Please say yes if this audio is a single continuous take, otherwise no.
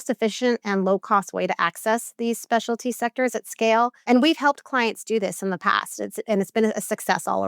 no